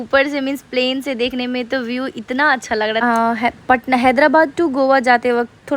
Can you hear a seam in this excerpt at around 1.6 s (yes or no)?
no